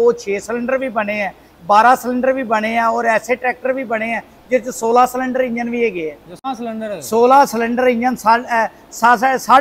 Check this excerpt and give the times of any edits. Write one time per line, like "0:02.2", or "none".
0:06.4